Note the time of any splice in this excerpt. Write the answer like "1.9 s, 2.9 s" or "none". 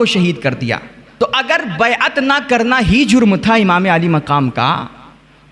1.0 s